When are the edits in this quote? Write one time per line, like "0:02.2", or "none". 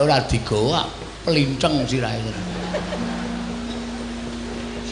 0:02.5